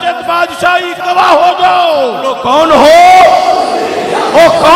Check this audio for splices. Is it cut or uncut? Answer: cut